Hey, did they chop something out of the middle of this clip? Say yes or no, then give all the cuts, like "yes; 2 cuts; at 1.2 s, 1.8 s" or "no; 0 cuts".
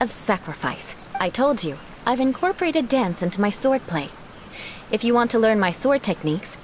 yes; 1 cut; at 1.2 s